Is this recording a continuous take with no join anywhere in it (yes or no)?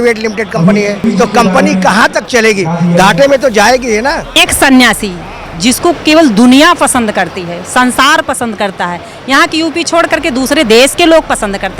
no